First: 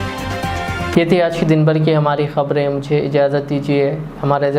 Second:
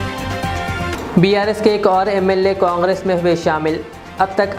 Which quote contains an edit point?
second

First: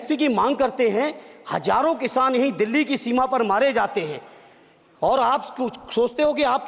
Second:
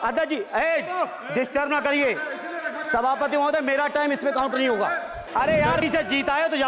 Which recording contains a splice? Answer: second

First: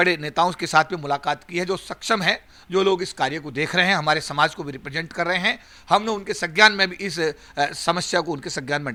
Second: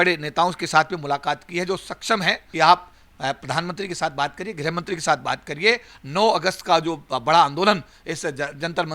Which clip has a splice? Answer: second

